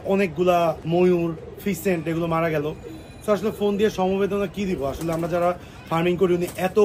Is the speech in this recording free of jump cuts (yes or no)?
yes